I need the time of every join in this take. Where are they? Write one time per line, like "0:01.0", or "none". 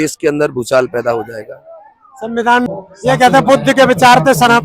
0:02.6